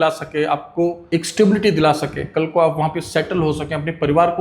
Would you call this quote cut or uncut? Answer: cut